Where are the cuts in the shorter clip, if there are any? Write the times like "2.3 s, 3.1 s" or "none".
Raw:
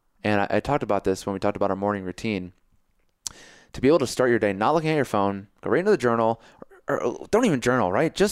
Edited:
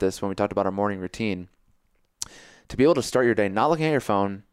none

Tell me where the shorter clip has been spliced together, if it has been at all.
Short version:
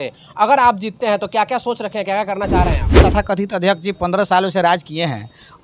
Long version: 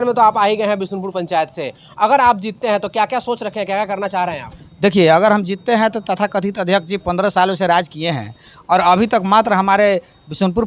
3.0 s

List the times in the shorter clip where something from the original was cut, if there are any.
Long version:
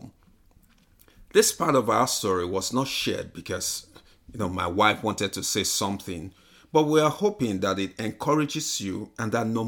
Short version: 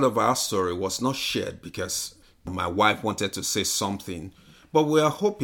2.5 s

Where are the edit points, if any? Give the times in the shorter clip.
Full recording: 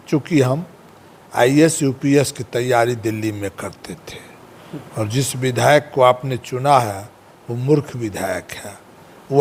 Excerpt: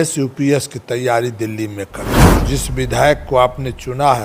2.2 s

